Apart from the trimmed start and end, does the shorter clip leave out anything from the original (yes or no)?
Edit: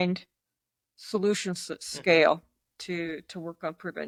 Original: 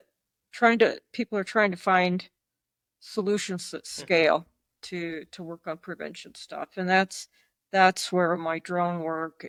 no